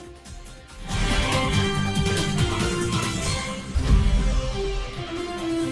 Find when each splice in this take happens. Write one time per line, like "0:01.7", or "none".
0:01.5
0:03.7